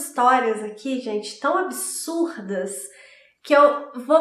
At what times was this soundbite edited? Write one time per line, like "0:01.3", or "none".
none